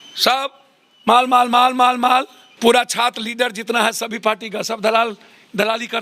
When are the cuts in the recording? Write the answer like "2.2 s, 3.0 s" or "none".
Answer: 2.4 s